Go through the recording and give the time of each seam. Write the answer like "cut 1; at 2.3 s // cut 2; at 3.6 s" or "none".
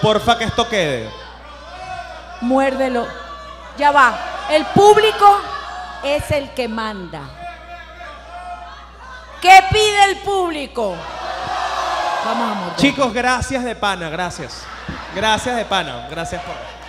cut 1; at 12.3 s